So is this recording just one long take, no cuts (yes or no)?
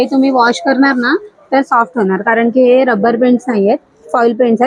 yes